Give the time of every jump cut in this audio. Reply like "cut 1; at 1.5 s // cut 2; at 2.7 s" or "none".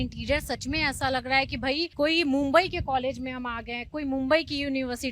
cut 1; at 1.9 s